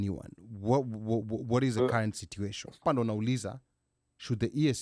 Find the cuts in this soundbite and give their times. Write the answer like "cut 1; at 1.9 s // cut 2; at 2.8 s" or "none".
cut 1; at 2.8 s